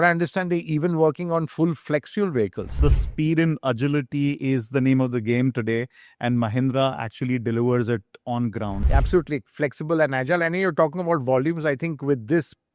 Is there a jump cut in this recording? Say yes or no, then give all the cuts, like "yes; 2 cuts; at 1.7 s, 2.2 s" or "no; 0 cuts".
yes; 2 cuts; at 2.7 s, 8.8 s